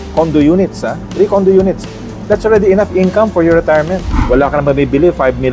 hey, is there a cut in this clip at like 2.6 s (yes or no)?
no